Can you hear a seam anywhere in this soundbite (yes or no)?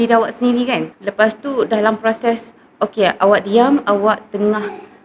yes